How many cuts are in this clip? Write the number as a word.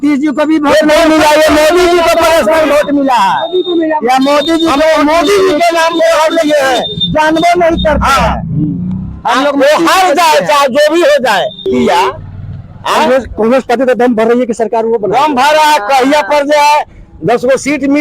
one